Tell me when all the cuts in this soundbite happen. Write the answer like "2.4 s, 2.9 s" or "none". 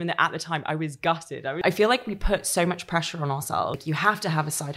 1.6 s, 3.8 s

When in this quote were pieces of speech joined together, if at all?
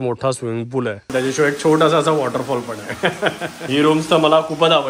1.1 s, 3.6 s

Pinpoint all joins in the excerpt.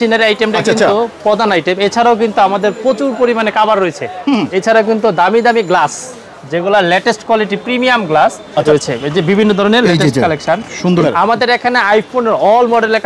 4.5 s, 8.6 s, 11.0 s

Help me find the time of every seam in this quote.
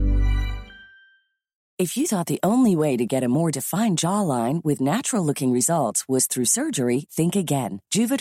1.7 s

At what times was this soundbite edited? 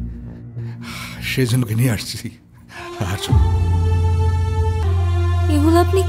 4.8 s

